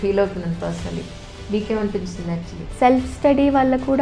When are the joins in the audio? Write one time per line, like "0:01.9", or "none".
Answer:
0:02.6